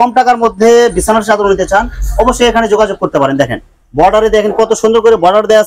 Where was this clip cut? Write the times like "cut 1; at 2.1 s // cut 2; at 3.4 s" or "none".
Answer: none